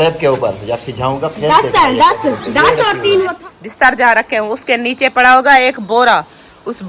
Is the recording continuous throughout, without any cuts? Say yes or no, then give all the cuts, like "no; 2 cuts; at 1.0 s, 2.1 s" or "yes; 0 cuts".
no; 1 cut; at 3.4 s